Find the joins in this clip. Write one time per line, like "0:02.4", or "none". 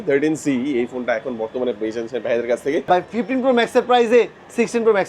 0:02.8